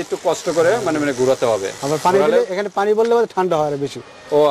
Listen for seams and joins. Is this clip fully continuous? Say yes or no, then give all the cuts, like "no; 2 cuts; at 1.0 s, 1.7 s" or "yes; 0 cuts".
yes; 0 cuts